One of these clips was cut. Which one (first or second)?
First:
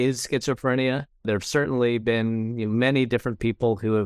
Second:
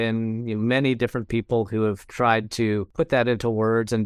second